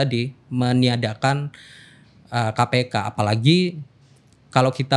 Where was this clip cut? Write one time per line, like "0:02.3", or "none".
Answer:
none

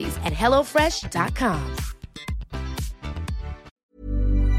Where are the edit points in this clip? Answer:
0:03.7

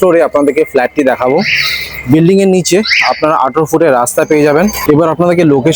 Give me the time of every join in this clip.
none

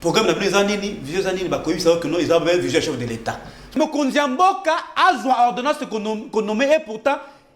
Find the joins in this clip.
0:03.8

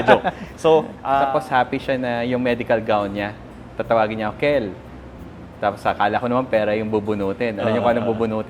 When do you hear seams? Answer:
0:01.0

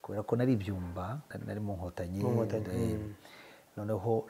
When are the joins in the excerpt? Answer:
0:01.3

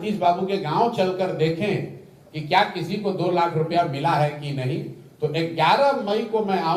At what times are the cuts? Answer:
none

